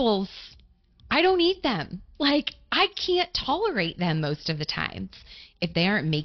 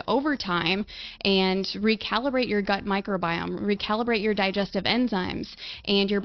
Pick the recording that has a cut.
first; 1 cut; at 5.3 s

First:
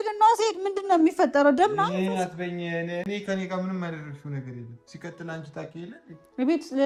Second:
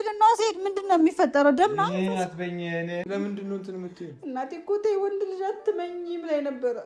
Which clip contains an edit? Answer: second; 1 cut; at 3.0 s

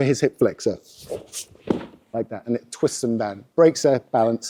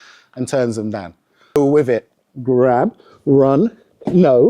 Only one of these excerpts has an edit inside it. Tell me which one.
second; 1 cut; at 1.6 s

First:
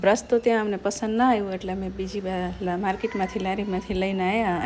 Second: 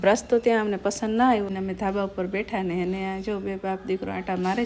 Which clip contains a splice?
second; 1 cut; at 1.5 s

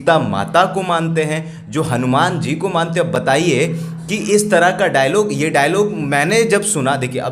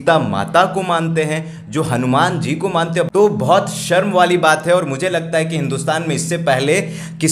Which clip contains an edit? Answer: second; 1 cut; at 3.1 s

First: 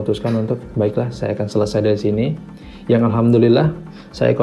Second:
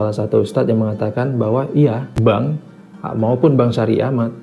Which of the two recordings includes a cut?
second; 1 cut; at 2.6 s

